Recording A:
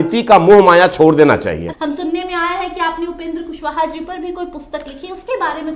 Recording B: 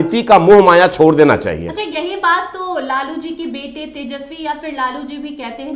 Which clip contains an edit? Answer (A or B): A